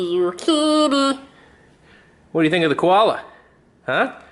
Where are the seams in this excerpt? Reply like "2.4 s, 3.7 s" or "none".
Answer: none